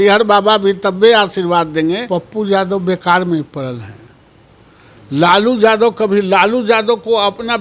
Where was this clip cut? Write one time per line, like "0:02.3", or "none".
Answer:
0:02.0